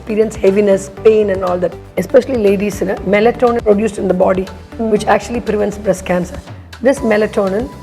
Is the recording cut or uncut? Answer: cut